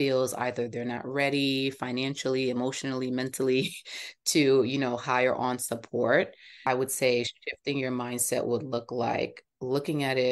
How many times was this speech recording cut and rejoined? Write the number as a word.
one